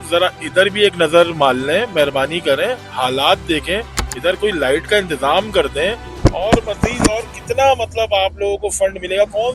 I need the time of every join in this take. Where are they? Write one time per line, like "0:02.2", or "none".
0:04.0